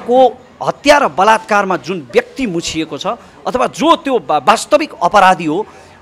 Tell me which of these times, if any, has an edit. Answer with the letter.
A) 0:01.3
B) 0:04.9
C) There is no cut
C